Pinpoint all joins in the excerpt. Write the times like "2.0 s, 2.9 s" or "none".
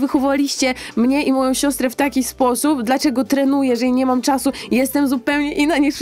none